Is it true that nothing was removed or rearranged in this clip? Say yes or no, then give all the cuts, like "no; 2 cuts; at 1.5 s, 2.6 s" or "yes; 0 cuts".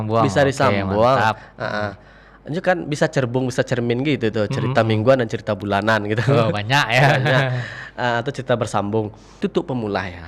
no; 1 cut; at 9.3 s